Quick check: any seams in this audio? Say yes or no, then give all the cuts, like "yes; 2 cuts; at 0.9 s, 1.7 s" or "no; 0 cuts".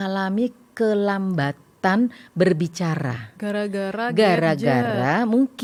no; 0 cuts